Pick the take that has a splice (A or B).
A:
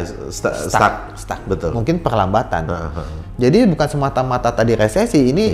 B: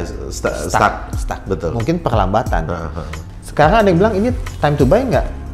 B